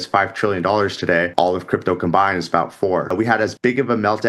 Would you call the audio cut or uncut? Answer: cut